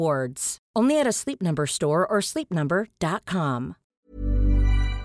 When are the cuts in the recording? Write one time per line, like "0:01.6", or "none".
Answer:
0:03.8